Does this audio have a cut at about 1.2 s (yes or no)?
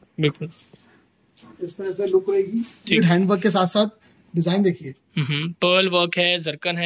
no